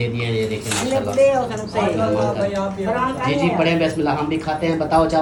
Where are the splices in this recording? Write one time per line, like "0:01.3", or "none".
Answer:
none